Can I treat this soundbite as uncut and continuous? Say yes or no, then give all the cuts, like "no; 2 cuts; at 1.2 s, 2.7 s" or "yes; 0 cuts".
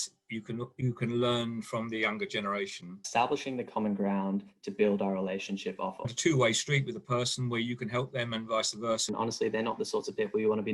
no; 3 cuts; at 2.9 s, 6.1 s, 9.1 s